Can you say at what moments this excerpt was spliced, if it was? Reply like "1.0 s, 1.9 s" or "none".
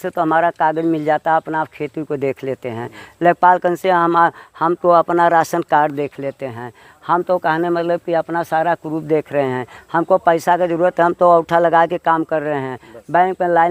none